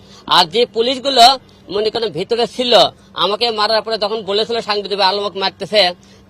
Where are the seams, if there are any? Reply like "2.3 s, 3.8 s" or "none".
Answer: none